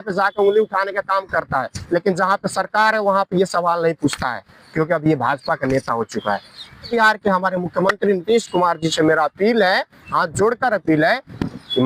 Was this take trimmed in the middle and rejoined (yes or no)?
yes